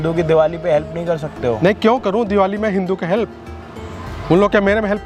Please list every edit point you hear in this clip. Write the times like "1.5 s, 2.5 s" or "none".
none